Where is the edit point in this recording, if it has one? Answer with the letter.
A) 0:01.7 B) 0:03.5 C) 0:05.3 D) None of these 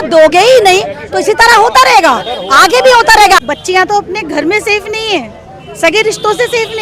B